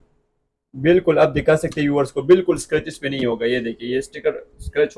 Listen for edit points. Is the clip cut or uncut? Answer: uncut